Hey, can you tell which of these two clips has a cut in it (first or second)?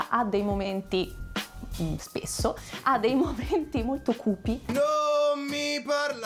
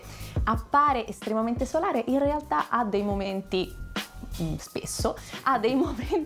first